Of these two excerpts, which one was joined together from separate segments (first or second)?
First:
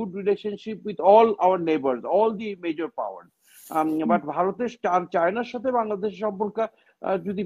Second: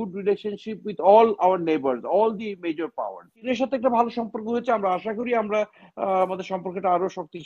second